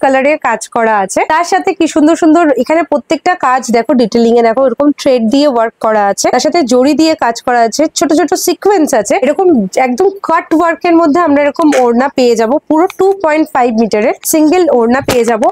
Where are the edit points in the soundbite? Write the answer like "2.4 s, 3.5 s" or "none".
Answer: none